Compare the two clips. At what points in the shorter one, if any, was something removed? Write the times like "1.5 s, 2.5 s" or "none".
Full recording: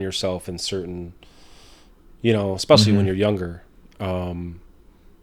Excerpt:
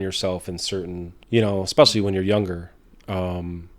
1.1 s